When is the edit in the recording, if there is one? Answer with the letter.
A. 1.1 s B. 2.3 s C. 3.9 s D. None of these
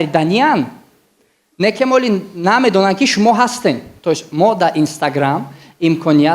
C